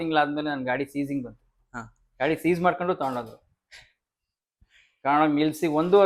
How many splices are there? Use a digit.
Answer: 0